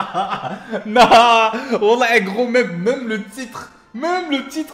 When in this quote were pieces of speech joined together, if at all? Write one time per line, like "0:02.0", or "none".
none